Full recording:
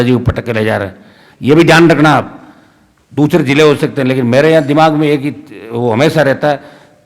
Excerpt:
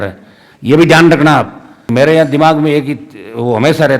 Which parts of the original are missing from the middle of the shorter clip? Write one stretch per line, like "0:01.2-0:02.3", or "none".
0:02.6-0:04.2